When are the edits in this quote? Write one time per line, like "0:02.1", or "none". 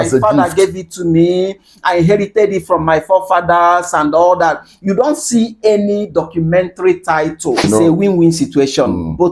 0:07.6